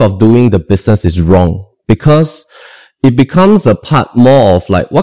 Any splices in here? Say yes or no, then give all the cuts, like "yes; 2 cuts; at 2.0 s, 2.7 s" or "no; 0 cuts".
no; 0 cuts